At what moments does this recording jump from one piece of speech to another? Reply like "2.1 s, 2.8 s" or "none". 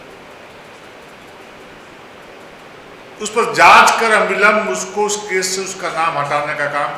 none